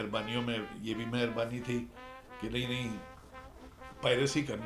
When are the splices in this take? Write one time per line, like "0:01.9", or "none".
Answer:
none